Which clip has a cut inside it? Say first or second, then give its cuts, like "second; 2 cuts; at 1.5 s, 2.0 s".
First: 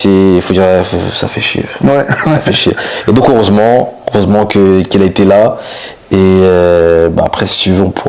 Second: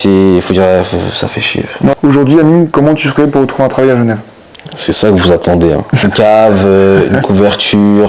second; 2 cuts; at 1.9 s, 6.0 s